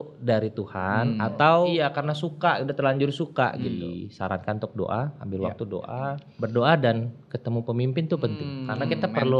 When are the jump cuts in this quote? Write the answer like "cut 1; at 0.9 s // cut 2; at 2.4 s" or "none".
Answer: cut 1; at 1.7 s // cut 2; at 3.8 s // cut 3; at 6.3 s // cut 4; at 8.5 s